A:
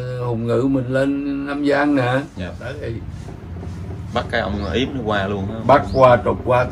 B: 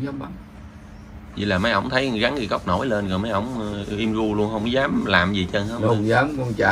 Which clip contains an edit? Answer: A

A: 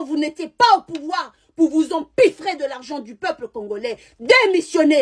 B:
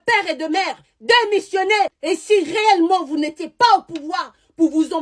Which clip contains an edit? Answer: B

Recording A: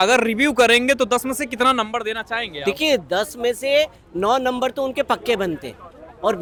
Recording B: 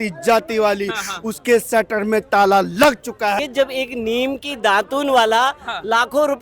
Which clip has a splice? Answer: B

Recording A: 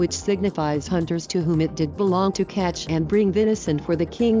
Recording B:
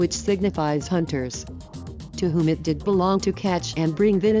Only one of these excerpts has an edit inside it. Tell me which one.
A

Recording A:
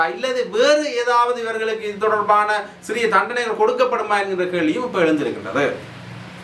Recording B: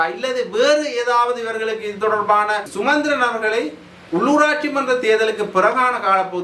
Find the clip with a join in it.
B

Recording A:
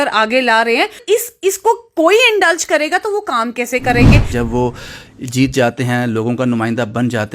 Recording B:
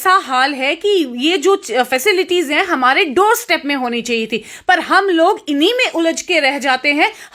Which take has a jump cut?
A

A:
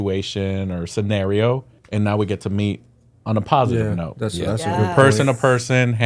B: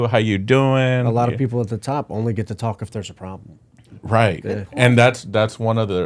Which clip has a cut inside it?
A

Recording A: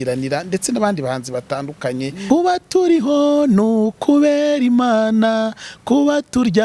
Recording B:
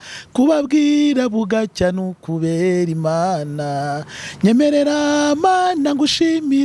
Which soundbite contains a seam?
A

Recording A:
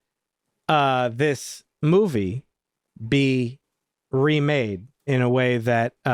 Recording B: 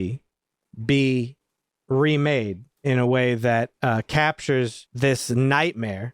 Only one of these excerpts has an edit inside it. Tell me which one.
B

